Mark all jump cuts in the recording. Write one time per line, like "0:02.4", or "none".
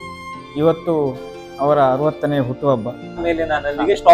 0:03.2